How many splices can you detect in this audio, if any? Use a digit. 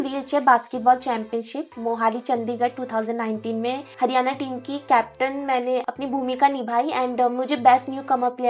2